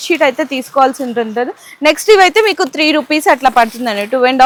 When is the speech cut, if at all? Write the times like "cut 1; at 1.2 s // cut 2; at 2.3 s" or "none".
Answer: none